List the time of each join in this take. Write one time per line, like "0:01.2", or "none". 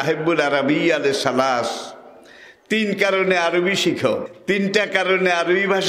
0:04.3